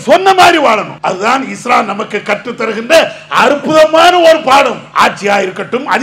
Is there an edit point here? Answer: yes; 2 cuts; at 0.9 s, 4.8 s

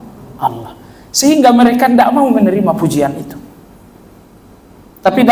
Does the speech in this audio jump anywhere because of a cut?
no; 0 cuts

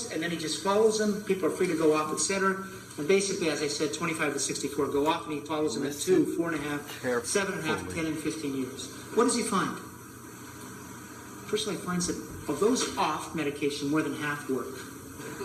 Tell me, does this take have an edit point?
no; 0 cuts

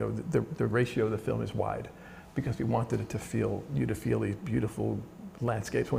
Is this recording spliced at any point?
no; 0 cuts

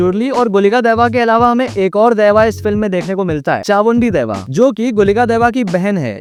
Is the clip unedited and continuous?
yes; 0 cuts

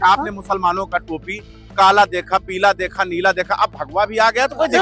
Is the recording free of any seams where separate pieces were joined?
yes; 0 cuts

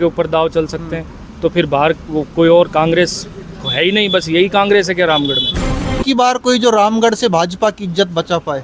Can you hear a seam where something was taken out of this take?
yes; 1 cut; at 6.0 s

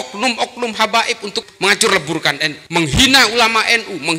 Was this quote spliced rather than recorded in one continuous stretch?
yes; 2 cuts; at 1.4 s, 2.5 s

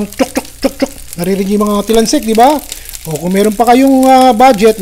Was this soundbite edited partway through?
no; 0 cuts

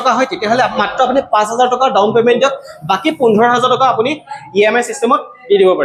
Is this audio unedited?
yes; 0 cuts

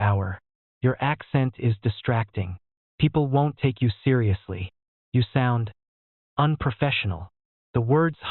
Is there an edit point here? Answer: no; 0 cuts

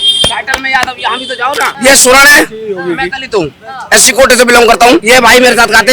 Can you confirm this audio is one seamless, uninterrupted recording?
no; 2 cuts; at 1.7 s, 5.0 s

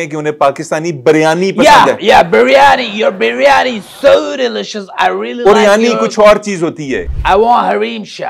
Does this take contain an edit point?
yes; 1 cut; at 7.1 s

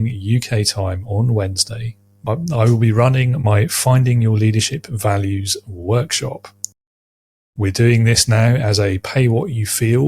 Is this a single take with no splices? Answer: no; 1 cut; at 2.3 s

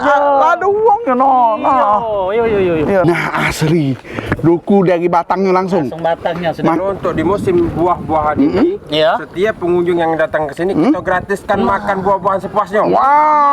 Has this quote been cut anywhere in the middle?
yes; 2 cuts; at 3.0 s, 6.8 s

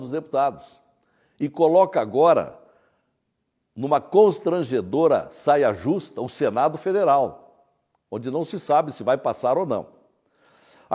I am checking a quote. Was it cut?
yes; 1 cut; at 4.3 s

